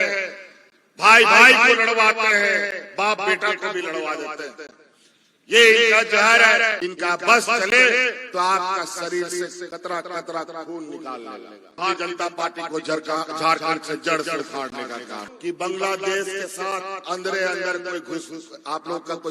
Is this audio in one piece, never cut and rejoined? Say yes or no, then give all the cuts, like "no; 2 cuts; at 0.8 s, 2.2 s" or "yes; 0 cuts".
no; 3 cuts; at 6.8 s, 11.8 s, 15.3 s